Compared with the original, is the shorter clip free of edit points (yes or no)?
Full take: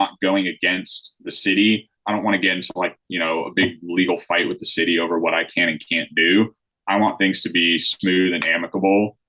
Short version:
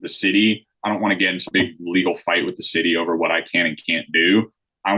no